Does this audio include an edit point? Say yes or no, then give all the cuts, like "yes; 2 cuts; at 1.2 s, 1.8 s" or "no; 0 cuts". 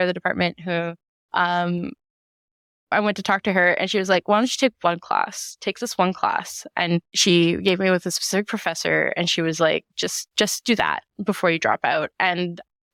no; 0 cuts